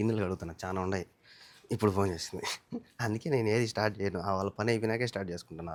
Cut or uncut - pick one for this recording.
uncut